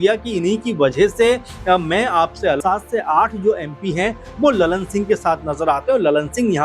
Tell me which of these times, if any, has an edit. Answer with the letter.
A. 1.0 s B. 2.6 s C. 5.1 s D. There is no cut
B